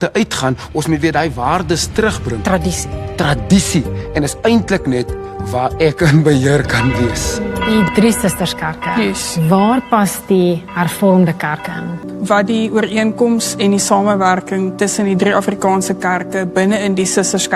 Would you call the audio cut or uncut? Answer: cut